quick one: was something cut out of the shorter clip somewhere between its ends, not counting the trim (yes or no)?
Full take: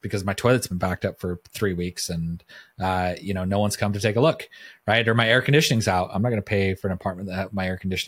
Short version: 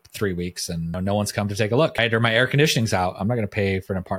yes